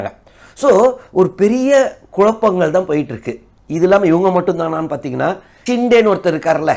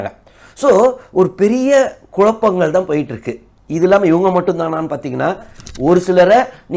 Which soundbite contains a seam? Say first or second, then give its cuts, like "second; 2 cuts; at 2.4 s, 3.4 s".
second; 1 cut; at 5.6 s